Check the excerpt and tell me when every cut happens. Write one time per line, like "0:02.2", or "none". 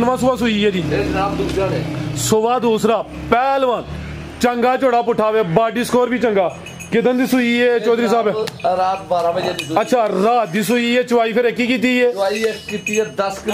none

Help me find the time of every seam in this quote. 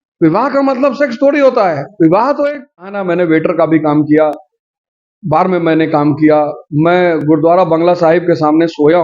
0:03.0

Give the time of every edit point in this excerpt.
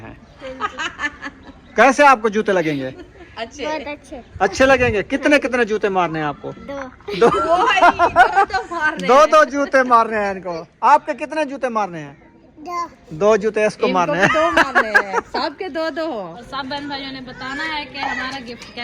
0:16.4

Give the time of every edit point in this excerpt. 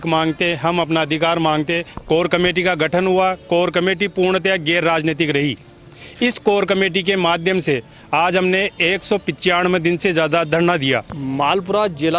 0:01.9
0:11.1

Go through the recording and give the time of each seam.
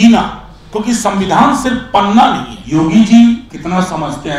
0:02.5
0:03.5

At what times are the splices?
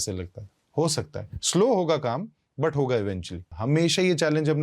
0:03.5

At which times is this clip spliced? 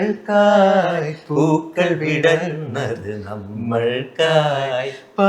none

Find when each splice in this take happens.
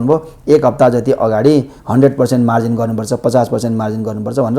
0:01.8

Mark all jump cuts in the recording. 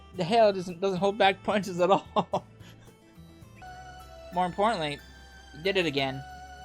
0:03.6

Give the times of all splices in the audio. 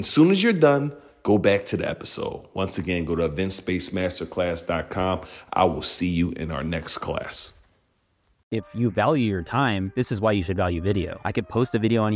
0:08.4
0:09.9
0:11.2

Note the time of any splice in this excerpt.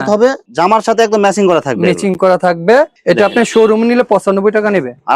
0:03.0

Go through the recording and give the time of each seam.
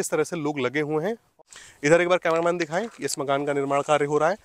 0:01.3

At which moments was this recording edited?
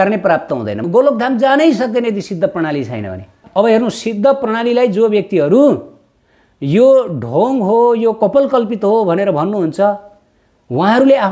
0:00.8
0:03.4

